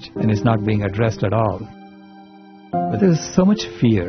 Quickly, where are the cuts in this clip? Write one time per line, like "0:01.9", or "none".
0:02.9